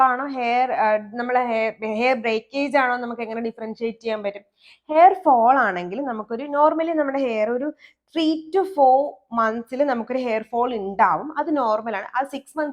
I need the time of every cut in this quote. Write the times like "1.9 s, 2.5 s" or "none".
none